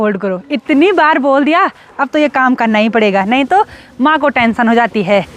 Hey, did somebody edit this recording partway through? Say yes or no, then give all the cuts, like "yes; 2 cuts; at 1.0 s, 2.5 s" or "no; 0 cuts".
no; 0 cuts